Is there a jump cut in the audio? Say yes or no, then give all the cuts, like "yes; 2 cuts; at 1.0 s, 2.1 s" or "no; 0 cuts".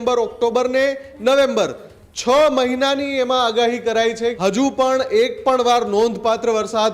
yes; 1 cut; at 4.4 s